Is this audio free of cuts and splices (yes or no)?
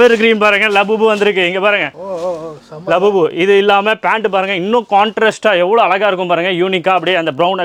yes